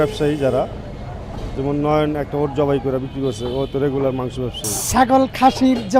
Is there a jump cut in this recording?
yes; 1 cut; at 4.9 s

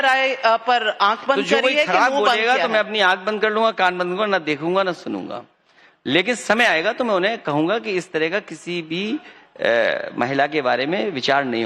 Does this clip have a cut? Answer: no; 0 cuts

